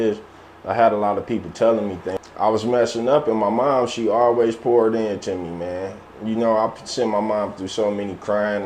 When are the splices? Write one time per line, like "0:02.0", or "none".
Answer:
0:02.1